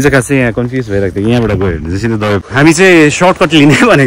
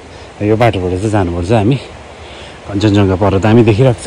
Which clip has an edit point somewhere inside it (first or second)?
first